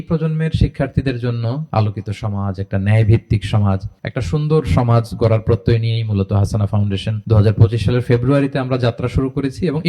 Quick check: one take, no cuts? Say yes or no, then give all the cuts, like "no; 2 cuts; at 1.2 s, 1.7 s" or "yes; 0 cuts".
no; 2 cuts; at 1.7 s, 7.2 s